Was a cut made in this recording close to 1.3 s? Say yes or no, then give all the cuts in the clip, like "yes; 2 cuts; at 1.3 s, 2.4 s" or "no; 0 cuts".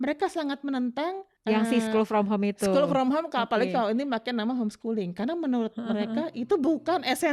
yes; 1 cut; at 1.3 s